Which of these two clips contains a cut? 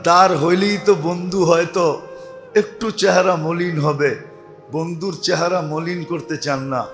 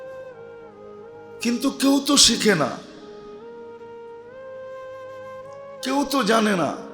second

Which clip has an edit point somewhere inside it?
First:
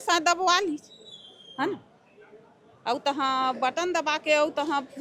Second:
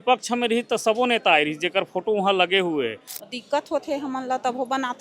second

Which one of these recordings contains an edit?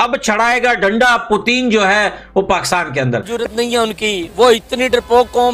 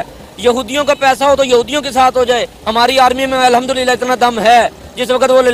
first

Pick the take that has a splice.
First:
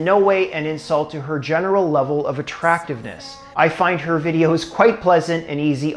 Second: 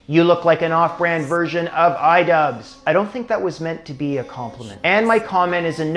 second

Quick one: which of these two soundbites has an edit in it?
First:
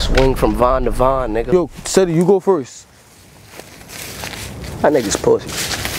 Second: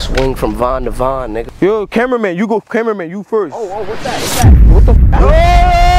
second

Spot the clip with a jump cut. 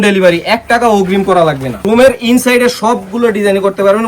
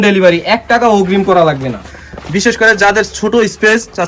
first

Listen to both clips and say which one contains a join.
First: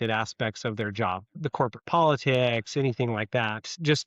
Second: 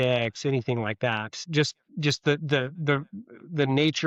first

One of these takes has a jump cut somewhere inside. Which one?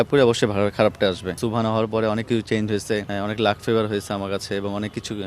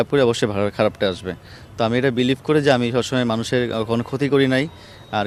first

